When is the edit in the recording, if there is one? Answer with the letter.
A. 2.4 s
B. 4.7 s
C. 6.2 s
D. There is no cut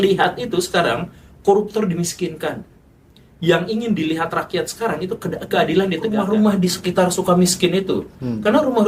C